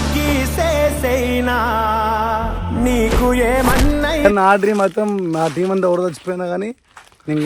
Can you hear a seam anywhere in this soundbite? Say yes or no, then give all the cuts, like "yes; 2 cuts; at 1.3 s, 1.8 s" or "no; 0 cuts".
yes; 1 cut; at 4.2 s